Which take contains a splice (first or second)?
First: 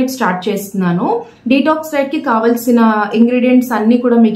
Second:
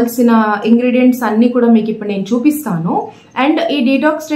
second